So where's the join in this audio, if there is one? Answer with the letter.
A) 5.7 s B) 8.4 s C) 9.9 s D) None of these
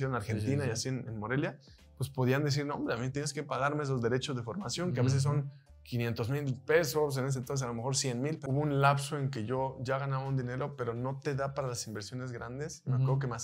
B